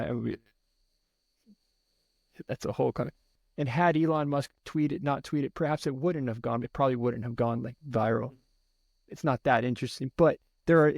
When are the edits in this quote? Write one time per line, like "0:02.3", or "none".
0:03.3